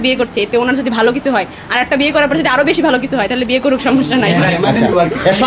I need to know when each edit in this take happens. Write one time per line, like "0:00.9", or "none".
none